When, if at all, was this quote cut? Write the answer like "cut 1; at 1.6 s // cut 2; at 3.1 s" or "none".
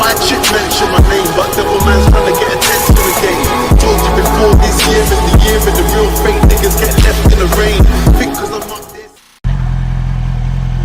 cut 1; at 3.8 s